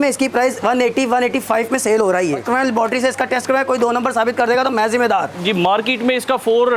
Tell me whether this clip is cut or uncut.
cut